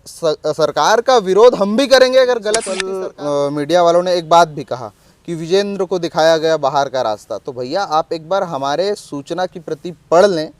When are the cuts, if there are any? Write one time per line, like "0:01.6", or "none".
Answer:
0:02.9